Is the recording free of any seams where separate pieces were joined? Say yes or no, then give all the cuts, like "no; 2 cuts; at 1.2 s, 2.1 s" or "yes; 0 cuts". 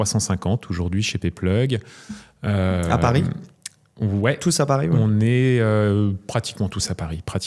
yes; 0 cuts